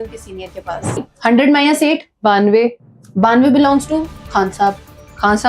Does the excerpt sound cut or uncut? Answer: cut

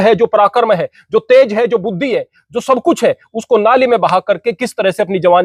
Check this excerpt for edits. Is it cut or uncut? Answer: uncut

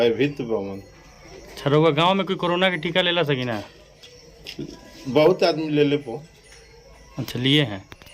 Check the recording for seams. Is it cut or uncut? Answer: uncut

